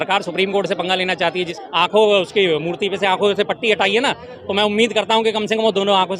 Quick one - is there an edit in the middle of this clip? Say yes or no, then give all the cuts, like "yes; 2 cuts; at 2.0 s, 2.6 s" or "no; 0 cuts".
yes; 1 cut; at 1.5 s